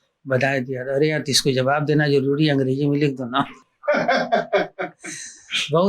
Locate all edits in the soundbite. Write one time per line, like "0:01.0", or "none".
none